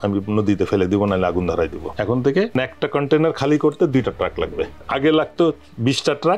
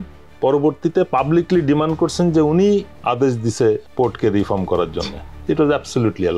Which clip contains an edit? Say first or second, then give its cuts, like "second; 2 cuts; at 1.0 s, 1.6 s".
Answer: first; 3 cuts; at 1.9 s, 2.5 s, 4.8 s